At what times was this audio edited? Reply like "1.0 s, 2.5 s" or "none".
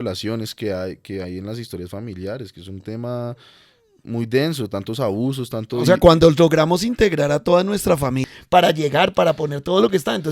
8.3 s